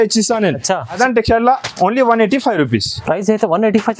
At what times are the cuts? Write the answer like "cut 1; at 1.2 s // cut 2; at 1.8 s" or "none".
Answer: cut 1; at 1.0 s